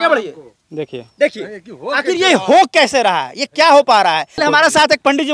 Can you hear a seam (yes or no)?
yes